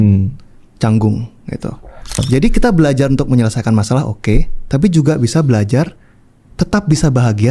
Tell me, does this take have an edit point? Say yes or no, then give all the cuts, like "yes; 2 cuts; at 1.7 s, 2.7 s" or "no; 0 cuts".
yes; 1 cut; at 2.2 s